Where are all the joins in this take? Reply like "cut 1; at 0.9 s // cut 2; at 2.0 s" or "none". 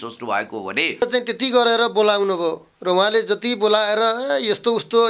cut 1; at 1.0 s